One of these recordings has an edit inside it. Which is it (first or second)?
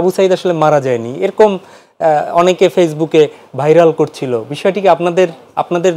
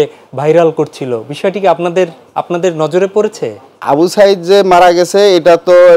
second